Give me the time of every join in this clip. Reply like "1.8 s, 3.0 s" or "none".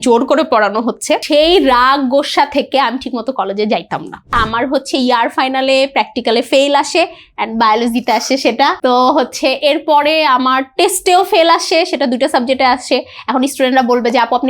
1.2 s, 4.4 s, 8.8 s